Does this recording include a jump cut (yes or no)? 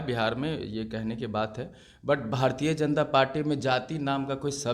no